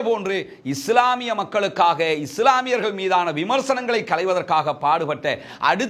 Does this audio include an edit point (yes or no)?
no